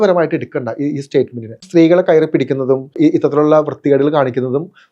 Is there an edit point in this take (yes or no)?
yes